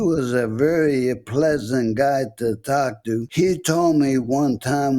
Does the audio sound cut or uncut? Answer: cut